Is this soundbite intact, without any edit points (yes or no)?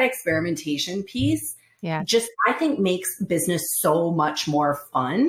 yes